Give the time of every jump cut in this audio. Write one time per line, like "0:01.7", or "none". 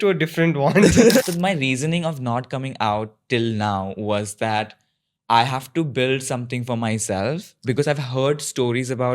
0:01.2